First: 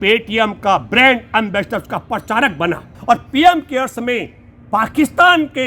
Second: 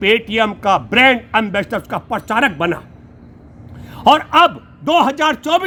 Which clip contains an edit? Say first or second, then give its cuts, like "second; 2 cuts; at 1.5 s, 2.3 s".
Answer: first; 1 cut; at 2.9 s